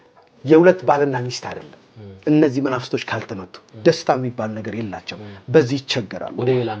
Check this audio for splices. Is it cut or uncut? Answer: uncut